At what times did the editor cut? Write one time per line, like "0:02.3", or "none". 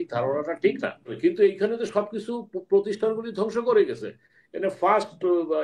0:01.1